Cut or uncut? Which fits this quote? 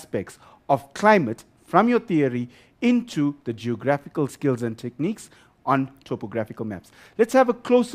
cut